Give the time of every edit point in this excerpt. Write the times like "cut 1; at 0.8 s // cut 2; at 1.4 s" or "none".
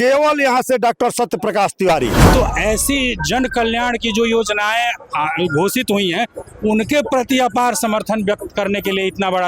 cut 1; at 2.2 s